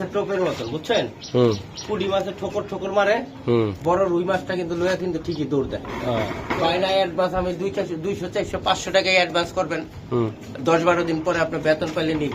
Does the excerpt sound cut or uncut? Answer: cut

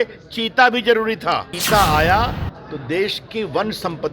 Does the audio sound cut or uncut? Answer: cut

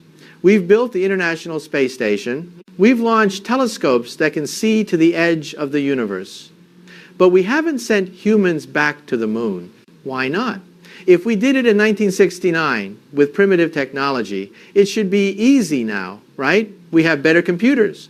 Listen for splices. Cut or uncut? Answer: uncut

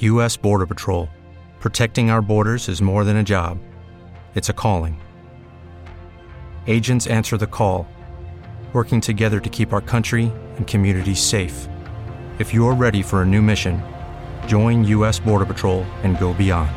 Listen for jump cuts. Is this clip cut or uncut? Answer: uncut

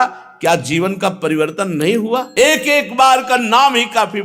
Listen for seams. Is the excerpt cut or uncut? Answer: cut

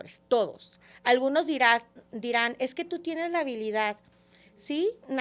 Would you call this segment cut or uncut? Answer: uncut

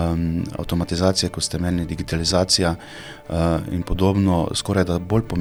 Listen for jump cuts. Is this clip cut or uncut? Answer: uncut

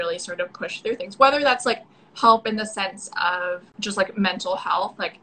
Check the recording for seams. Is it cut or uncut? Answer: cut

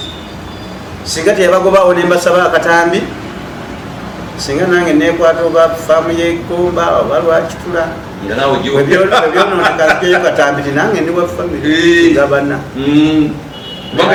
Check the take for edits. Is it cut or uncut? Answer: uncut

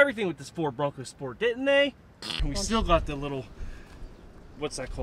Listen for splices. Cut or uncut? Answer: cut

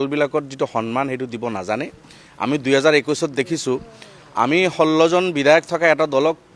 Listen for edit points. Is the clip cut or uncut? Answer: uncut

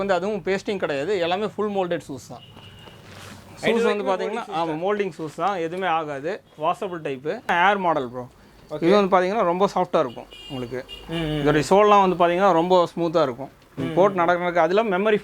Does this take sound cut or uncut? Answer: cut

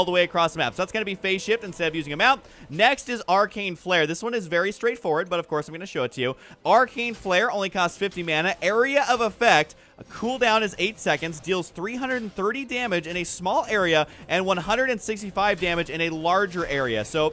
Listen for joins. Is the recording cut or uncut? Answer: uncut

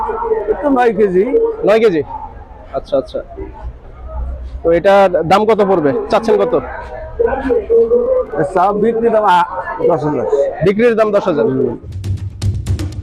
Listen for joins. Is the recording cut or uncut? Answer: cut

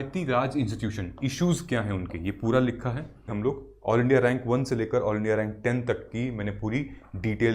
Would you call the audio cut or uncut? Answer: cut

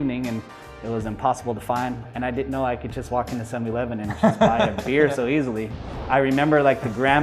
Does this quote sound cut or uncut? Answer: cut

